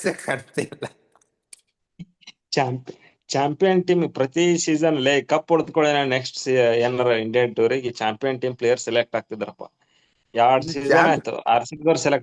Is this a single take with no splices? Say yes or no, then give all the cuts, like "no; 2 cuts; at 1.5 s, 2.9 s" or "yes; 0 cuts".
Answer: yes; 0 cuts